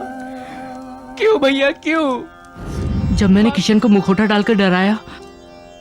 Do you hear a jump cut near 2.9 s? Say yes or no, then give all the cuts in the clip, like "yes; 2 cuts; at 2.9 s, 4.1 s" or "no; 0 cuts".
yes; 1 cut; at 2.9 s